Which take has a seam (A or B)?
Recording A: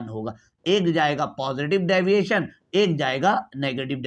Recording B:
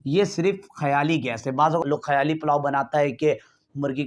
B